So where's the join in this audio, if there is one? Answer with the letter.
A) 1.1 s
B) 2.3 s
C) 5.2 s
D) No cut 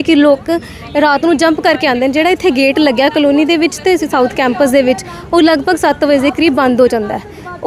D